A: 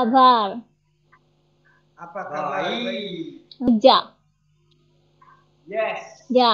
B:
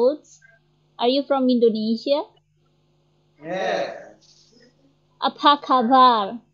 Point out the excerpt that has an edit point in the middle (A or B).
A